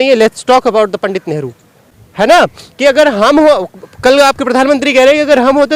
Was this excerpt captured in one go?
yes; 0 cuts

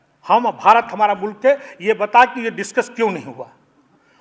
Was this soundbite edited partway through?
no; 0 cuts

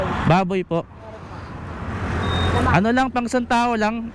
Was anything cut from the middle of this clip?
no; 0 cuts

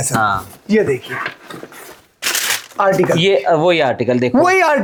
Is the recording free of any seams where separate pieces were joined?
yes; 0 cuts

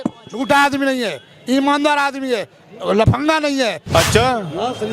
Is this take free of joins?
no; 1 cut; at 3.9 s

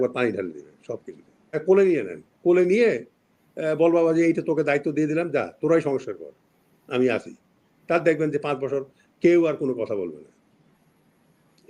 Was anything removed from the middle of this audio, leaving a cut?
yes; 1 cut; at 1.5 s

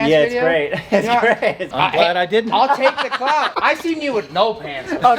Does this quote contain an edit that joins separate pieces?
yes; 2 cuts; at 1.7 s, 3.5 s

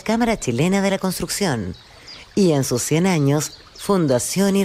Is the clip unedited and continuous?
yes; 0 cuts

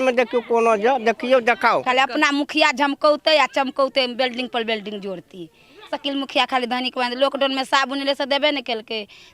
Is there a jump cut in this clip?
yes; 1 cut; at 1.8 s

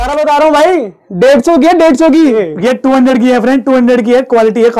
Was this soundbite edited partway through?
yes; 1 cut; at 2.3 s

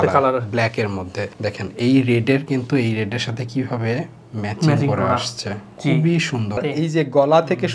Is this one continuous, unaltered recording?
no; 1 cut; at 6.6 s

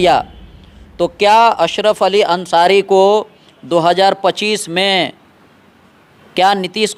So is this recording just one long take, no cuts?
yes; 0 cuts

